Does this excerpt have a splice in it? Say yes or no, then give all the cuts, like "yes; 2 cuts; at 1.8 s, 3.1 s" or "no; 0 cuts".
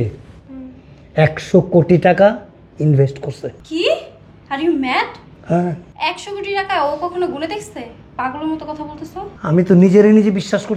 no; 0 cuts